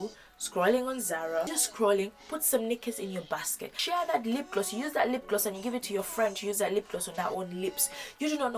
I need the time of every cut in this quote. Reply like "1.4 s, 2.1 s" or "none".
1.6 s, 3.8 s